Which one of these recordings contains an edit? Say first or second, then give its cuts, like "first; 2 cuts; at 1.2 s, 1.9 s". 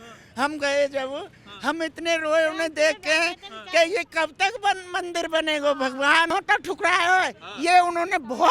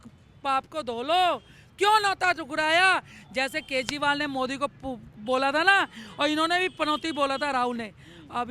first; 1 cut; at 6.3 s